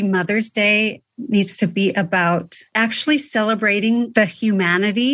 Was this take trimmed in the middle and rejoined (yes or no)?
yes